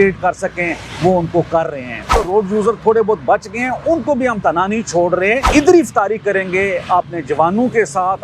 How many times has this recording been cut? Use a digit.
2